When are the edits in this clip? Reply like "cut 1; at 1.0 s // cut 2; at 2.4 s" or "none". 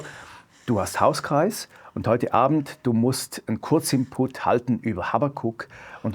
none